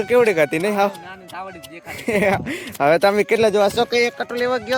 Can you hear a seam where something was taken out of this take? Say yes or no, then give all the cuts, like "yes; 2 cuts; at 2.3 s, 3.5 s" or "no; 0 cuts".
no; 0 cuts